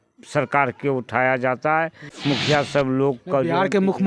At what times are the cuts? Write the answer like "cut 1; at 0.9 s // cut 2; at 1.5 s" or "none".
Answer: cut 1; at 2.1 s